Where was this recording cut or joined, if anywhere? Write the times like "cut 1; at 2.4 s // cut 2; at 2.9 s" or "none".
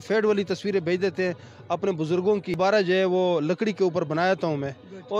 none